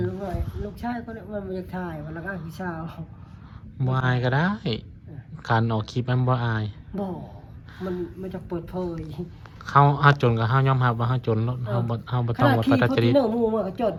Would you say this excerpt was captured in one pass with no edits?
yes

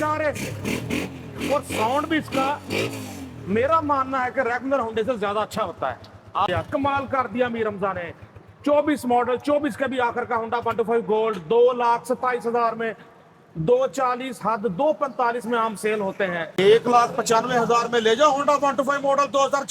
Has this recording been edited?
yes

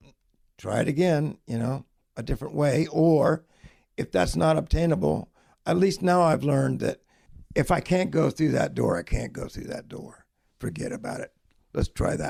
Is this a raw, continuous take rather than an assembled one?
yes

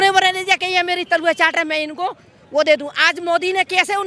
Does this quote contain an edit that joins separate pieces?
no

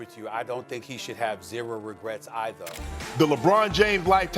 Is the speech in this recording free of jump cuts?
no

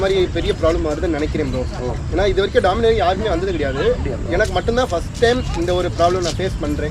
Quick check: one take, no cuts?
yes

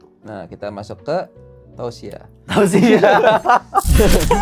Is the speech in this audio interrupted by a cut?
no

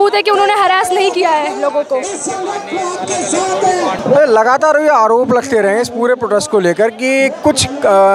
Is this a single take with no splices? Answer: yes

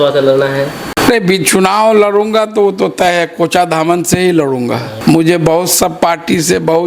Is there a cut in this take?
yes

